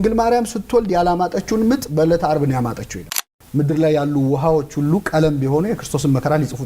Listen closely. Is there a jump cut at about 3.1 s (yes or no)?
yes